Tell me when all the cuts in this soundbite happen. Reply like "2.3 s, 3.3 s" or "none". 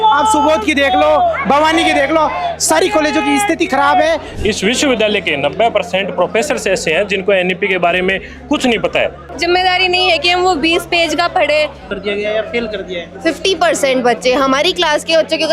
4.3 s, 9.2 s, 11.9 s